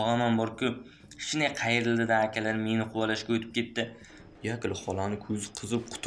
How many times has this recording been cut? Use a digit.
1